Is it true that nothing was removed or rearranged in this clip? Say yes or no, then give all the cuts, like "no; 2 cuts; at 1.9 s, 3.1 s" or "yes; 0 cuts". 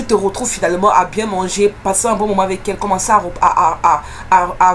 yes; 0 cuts